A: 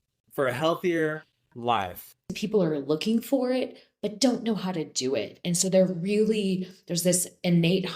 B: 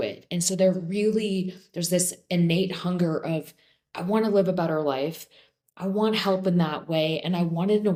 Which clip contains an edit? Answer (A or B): A